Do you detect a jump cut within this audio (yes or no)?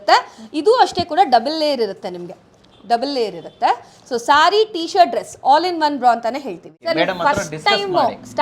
yes